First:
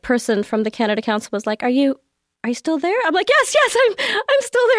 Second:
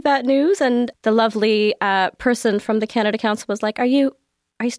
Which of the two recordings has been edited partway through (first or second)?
second